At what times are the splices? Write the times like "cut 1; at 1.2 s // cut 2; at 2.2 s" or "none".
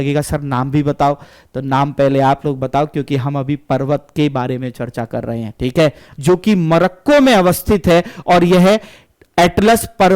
cut 1; at 6.1 s